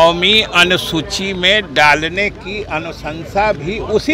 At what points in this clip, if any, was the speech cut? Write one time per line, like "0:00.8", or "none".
none